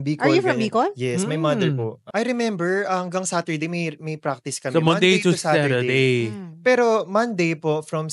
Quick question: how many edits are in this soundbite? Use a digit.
1